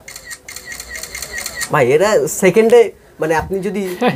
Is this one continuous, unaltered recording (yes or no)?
yes